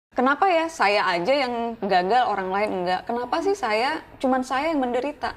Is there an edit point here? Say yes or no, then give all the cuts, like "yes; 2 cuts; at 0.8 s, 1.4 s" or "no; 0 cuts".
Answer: no; 0 cuts